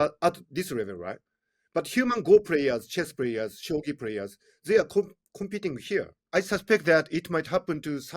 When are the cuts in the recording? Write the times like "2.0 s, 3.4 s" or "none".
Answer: 6.2 s